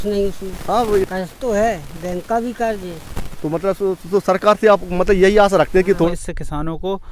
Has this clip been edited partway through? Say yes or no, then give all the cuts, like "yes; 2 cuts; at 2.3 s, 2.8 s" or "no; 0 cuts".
yes; 2 cuts; at 1.0 s, 6.1 s